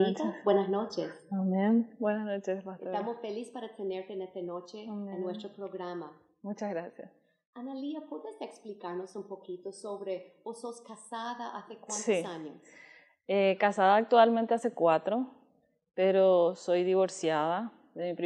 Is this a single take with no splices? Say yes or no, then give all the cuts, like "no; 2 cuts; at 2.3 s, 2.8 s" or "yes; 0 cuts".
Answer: yes; 0 cuts